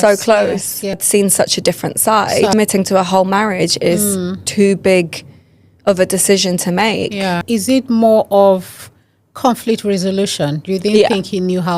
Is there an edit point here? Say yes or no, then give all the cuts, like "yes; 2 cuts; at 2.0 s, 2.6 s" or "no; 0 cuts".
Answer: yes; 3 cuts; at 1.0 s, 2.5 s, 7.4 s